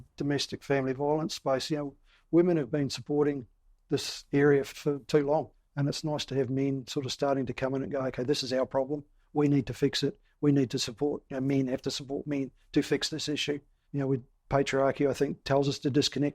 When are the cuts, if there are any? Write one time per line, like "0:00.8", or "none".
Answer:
0:04.7
0:05.6
0:13.8

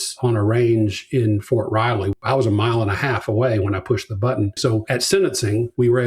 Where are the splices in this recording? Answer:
0:02.1
0:04.5

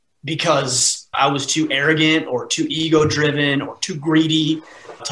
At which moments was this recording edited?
0:01.1

